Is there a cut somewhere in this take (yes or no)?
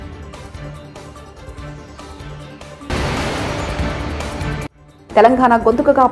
yes